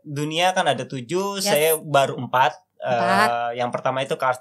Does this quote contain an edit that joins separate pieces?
no; 0 cuts

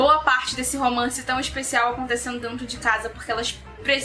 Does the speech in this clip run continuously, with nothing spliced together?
yes; 0 cuts

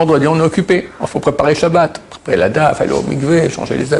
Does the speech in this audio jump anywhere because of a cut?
no; 0 cuts

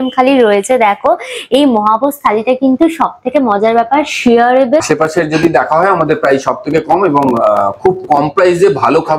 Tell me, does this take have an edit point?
yes; 1 cut; at 4.8 s

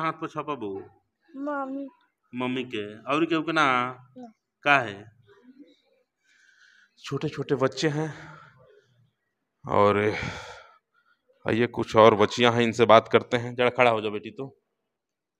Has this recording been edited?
no; 0 cuts

